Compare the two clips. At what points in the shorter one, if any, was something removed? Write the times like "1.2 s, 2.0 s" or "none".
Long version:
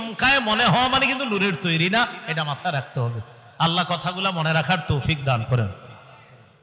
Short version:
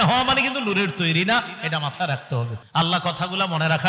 2.6 s